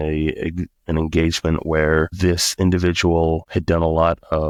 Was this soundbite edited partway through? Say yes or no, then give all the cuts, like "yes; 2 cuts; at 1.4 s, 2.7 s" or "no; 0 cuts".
no; 0 cuts